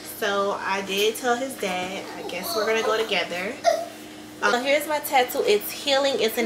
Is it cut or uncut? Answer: cut